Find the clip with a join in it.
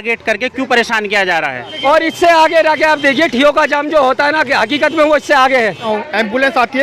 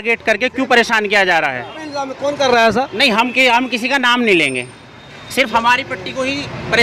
first; 2 cuts; at 1.7 s, 5.9 s

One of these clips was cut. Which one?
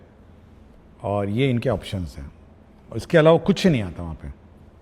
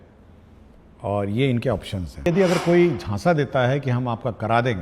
second; 1 cut; at 2.3 s

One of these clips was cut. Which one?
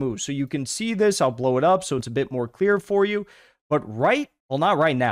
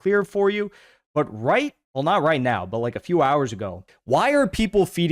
second; 1 cut; at 3.9 s

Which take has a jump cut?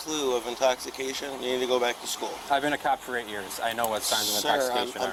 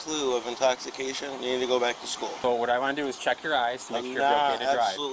second; 1 cut; at 2.3 s

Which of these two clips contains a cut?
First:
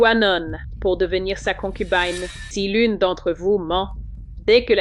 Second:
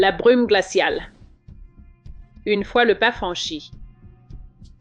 first; 1 cut; at 2.4 s

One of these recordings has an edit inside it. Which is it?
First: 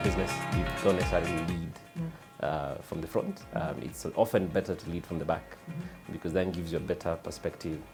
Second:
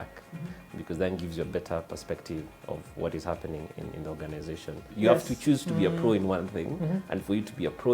second; 1 cut; at 4.9 s

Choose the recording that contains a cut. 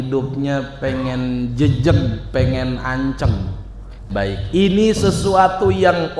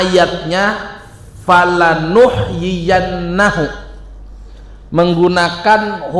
first; 1 cut; at 4.1 s

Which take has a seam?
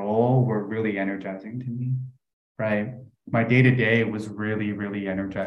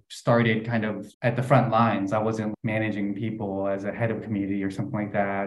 second; 2 cuts; at 1.1 s, 2.6 s

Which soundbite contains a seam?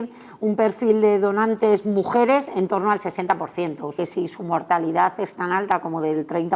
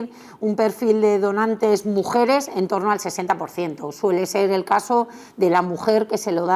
first; 1 cut; at 3.8 s

